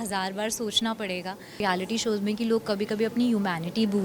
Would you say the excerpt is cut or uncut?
cut